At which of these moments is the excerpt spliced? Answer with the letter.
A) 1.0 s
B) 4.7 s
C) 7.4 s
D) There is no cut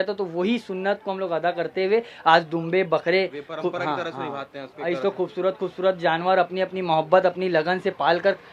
D